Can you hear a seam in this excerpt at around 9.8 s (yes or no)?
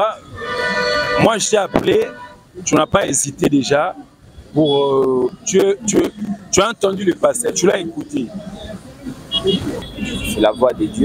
yes